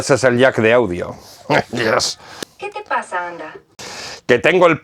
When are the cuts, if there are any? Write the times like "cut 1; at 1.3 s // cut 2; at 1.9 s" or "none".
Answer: cut 1; at 2.2 s // cut 2; at 3.7 s